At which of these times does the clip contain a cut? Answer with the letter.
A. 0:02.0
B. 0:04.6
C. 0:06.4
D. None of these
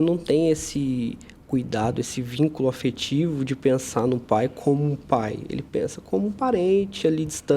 D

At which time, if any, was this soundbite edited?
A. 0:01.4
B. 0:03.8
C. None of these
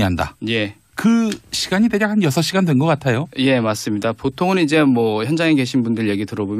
B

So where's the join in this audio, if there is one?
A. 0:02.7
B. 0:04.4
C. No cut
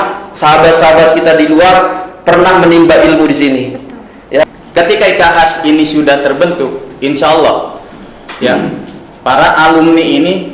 B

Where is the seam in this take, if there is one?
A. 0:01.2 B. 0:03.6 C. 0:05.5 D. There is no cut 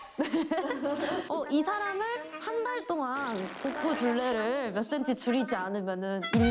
A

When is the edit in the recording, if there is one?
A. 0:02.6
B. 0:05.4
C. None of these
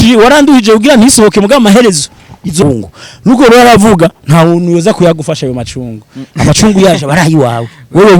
A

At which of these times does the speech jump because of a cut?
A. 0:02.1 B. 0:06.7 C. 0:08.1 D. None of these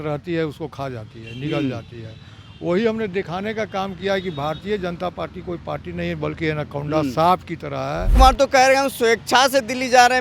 C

